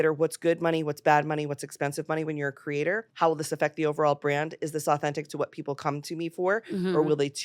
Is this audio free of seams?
no; 1 cut; at 3.1 s

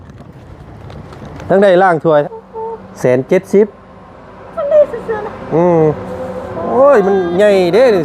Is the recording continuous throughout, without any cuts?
no; 1 cut; at 2.2 s

